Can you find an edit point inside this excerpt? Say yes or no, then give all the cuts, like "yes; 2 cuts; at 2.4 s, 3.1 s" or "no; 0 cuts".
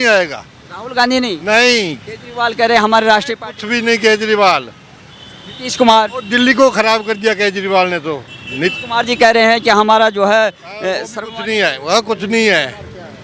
no; 0 cuts